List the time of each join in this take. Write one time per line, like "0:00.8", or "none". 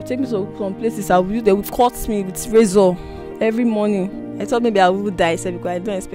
0:04.3